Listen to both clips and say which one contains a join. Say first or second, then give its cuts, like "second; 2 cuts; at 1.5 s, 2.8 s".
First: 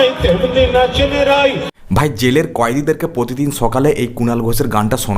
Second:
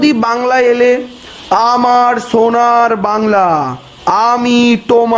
first; 1 cut; at 1.7 s